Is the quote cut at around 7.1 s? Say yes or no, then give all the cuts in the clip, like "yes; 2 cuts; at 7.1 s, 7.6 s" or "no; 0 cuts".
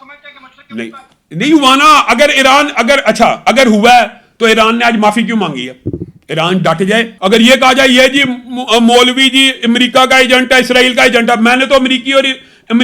yes; 1 cut; at 7.1 s